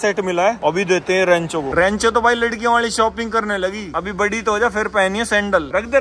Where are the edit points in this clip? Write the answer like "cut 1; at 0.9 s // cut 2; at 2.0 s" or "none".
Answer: cut 1; at 1.7 s